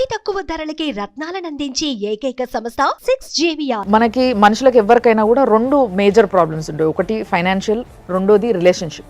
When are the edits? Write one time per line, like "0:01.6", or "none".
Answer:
0:03.8